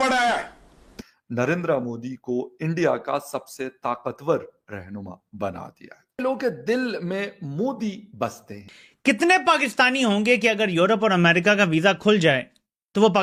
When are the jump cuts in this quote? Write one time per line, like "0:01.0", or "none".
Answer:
none